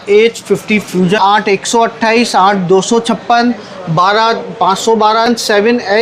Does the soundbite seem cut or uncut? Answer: cut